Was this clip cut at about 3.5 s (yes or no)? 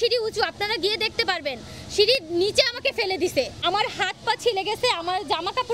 yes